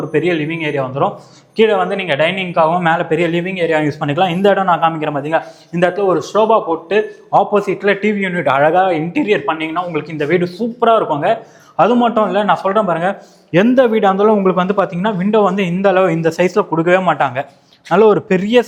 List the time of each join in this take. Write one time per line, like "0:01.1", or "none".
none